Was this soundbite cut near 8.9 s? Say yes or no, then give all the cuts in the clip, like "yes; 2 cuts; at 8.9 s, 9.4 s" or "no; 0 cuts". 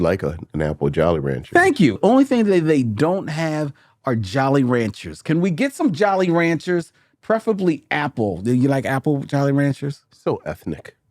no; 1 cut; at 2.0 s